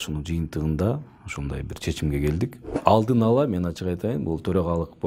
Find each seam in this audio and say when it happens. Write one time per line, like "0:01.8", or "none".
0:02.7

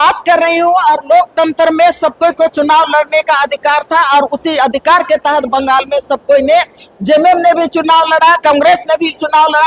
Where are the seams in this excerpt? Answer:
none

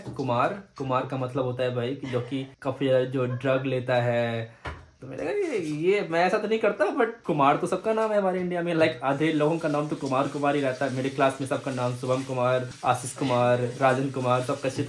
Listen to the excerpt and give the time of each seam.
none

